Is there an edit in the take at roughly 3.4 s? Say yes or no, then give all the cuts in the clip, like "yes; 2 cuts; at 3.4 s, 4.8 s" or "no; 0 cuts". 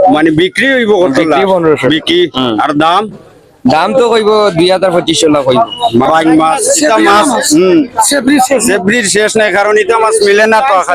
no; 1 cut; at 6.1 s